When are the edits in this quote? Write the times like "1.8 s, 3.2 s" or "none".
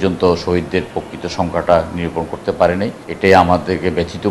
3.0 s